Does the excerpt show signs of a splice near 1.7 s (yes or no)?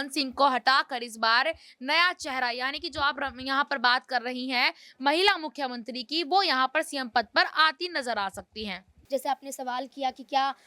no